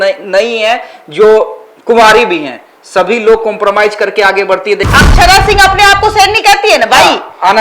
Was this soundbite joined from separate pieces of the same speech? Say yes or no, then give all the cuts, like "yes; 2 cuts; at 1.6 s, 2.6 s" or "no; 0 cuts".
yes; 1 cut; at 4.9 s